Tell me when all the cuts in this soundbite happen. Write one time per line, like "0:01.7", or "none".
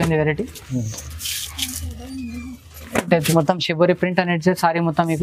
0:03.3